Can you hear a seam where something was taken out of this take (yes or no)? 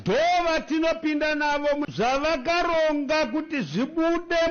yes